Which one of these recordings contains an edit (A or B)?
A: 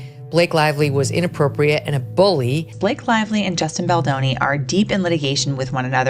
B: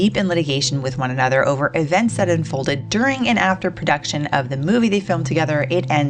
A